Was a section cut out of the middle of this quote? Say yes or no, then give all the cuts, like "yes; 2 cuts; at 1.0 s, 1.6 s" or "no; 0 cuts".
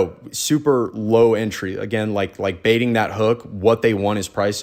no; 0 cuts